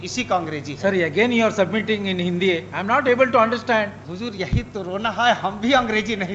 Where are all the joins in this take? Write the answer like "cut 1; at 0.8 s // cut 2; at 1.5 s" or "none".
cut 1; at 4.0 s